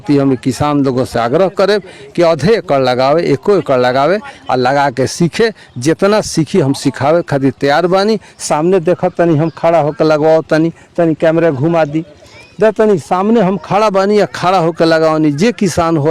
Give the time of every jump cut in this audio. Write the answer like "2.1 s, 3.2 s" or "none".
none